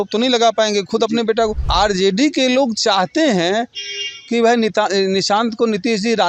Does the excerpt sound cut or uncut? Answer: cut